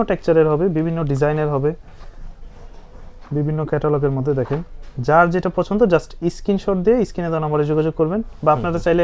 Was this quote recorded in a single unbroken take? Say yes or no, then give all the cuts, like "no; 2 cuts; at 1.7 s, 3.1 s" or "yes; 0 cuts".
yes; 0 cuts